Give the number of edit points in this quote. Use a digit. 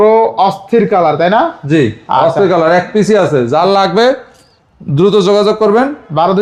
0